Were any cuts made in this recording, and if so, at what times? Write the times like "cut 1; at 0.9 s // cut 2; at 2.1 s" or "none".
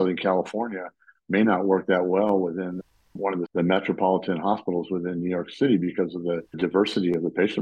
cut 1; at 6.5 s